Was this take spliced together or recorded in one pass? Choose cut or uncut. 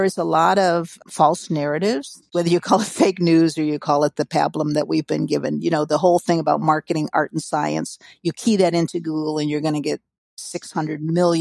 cut